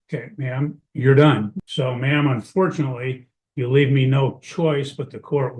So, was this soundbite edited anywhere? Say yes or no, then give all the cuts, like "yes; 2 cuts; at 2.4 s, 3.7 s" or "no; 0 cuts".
yes; 1 cut; at 1.6 s